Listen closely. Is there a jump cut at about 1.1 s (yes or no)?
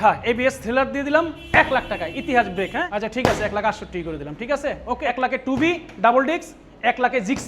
no